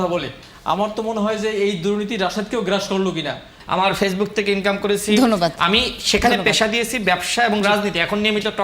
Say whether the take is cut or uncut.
cut